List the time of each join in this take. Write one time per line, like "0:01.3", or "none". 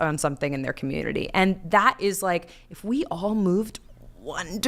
none